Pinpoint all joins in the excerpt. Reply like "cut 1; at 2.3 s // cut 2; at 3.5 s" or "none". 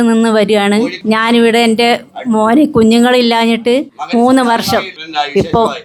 cut 1; at 4.0 s // cut 2; at 5.0 s